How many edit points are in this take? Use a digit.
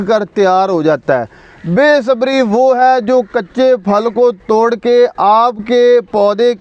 0